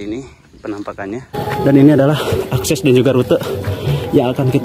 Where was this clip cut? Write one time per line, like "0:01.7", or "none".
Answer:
0:01.3